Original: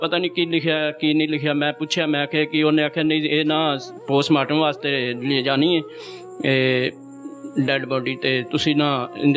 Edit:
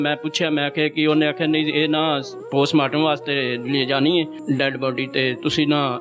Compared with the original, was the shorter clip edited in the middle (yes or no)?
yes